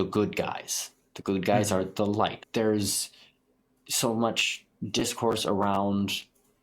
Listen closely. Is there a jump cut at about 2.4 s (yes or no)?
yes